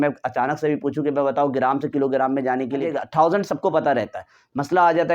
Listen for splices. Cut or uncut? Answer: cut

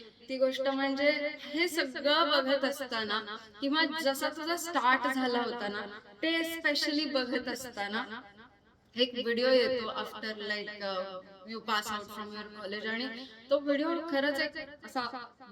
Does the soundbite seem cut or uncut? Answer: uncut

